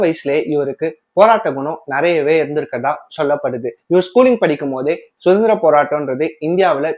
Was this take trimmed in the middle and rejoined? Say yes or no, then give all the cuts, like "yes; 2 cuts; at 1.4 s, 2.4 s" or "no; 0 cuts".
no; 0 cuts